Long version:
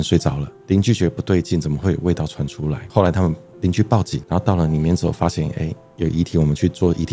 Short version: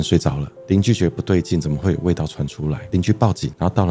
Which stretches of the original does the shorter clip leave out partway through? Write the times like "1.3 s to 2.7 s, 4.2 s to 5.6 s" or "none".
2.8 s to 3.5 s